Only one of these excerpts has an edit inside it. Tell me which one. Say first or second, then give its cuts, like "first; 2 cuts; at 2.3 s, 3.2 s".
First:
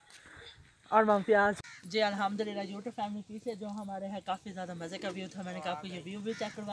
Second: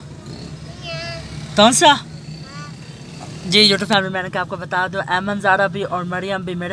first; 1 cut; at 1.7 s